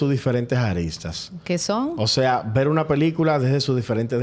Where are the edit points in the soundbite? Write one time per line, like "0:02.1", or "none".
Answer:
none